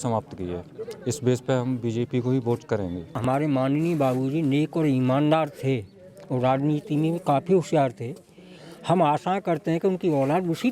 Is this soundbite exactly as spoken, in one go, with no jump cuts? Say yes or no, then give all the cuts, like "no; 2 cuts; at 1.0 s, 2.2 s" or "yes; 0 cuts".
no; 1 cut; at 3.1 s